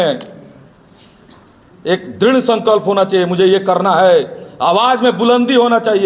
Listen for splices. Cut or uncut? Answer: uncut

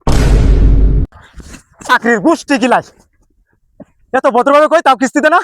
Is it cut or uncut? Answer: cut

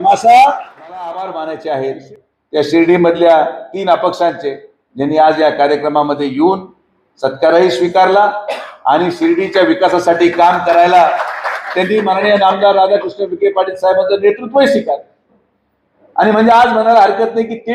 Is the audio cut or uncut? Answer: cut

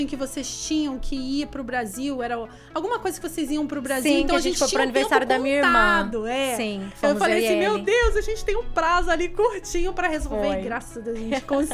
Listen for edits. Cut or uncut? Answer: uncut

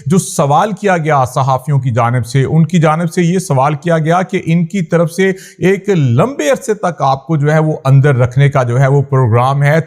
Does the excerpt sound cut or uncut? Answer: uncut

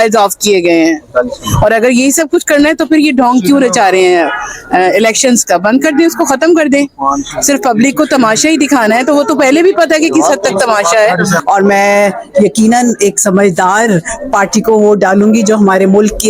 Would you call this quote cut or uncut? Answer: cut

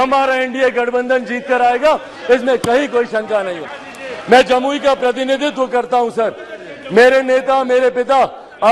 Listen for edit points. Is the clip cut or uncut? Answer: uncut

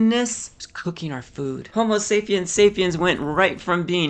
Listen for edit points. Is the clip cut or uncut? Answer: cut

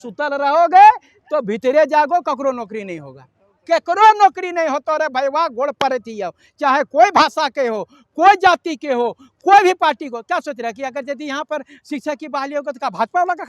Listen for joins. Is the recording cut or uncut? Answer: uncut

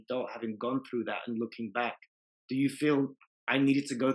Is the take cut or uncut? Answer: uncut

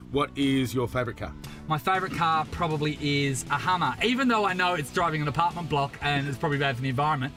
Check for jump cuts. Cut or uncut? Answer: uncut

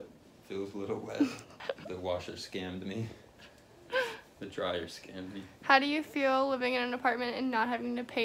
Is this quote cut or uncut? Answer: cut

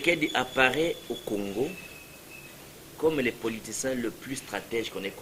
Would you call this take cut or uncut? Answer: uncut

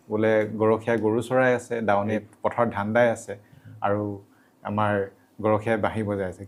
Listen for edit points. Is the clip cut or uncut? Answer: uncut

